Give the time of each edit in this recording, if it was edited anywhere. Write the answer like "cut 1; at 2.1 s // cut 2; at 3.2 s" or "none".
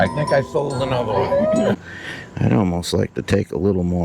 cut 1; at 1.8 s